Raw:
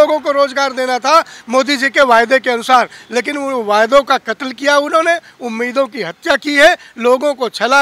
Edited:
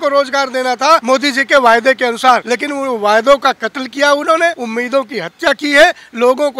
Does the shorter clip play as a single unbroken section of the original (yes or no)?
no